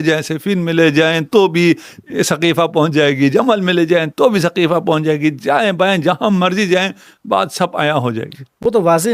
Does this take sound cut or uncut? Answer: uncut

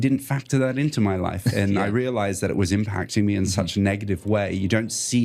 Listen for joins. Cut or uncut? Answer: uncut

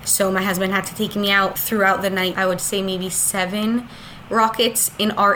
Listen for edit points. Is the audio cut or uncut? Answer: cut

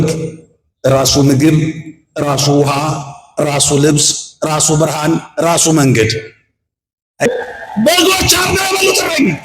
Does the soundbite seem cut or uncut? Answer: cut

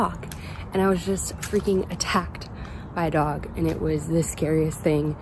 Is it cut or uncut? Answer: uncut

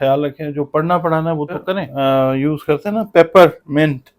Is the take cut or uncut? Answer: cut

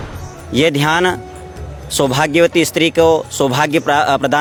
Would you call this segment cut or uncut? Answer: uncut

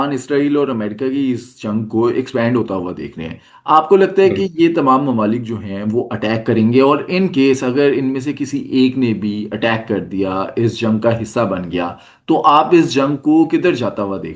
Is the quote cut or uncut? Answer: uncut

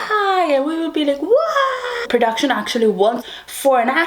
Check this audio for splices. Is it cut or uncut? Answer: cut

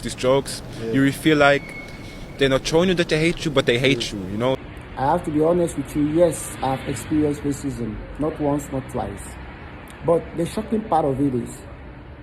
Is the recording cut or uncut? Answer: cut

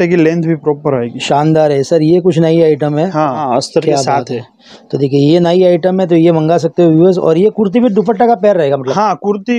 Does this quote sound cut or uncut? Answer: cut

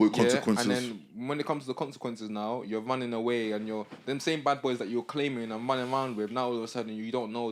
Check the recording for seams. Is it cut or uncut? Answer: uncut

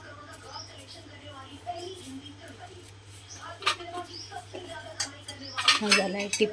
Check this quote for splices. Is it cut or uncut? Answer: uncut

